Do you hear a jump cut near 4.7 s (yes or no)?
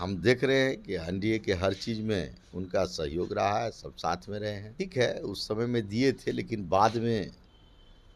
yes